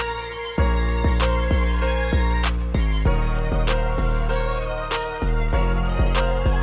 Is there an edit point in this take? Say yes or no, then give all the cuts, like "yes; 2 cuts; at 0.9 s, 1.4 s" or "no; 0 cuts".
no; 0 cuts